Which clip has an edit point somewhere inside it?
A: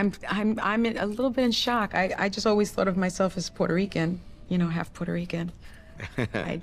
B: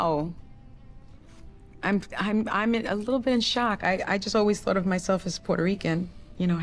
A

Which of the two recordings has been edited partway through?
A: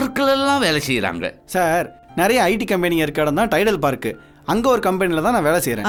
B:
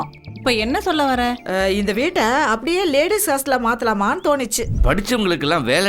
B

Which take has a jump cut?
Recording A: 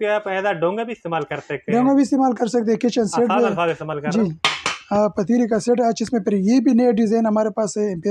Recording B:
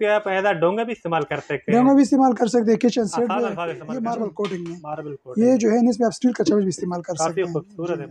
B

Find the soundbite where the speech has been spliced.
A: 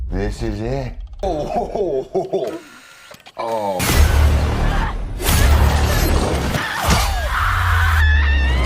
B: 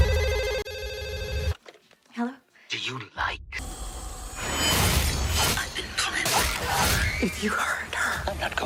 A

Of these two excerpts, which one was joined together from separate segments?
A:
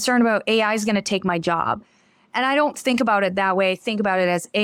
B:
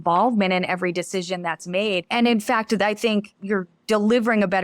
B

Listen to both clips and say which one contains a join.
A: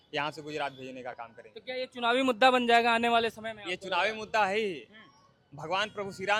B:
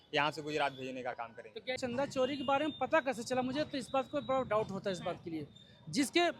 B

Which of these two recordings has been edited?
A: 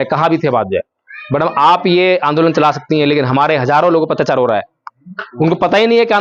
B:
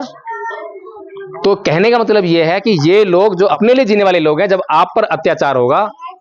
B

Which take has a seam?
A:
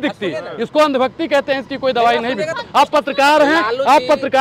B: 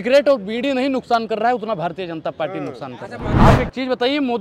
B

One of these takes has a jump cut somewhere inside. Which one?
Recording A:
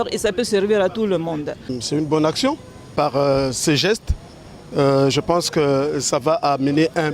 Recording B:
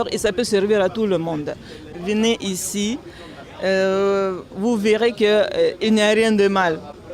A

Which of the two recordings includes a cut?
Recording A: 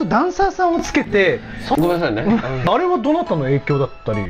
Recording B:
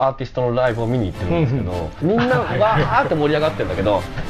A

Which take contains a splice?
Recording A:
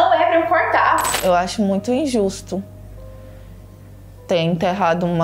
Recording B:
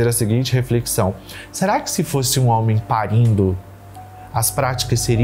A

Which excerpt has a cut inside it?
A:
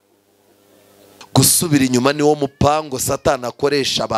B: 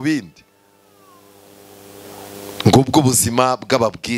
A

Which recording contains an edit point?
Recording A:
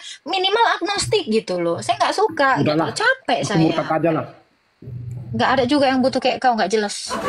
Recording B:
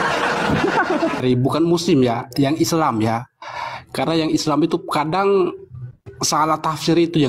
B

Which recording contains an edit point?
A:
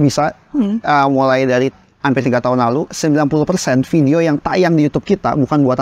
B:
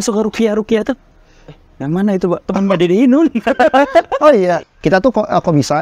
B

